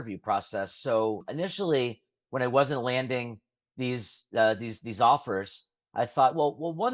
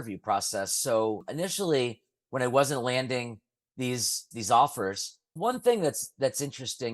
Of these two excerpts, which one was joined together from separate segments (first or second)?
second